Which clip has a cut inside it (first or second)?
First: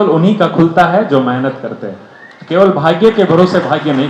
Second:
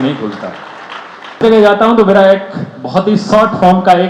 second